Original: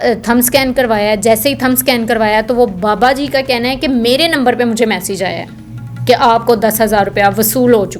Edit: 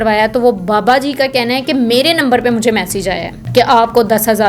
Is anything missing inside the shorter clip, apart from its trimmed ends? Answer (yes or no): yes